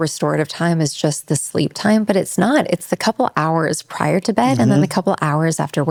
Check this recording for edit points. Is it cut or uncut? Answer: uncut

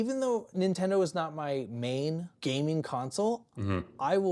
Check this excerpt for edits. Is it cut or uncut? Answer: cut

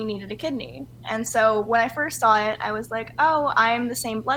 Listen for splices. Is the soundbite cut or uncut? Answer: uncut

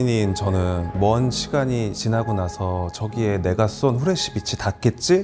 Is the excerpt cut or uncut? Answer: cut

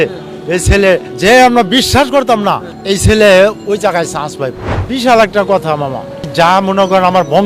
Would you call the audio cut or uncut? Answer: cut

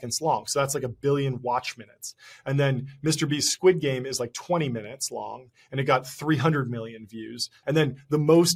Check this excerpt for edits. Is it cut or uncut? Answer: cut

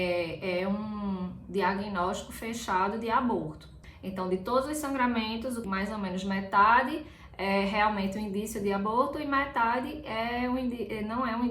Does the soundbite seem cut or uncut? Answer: cut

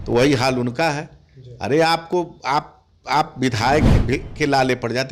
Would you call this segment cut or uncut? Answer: uncut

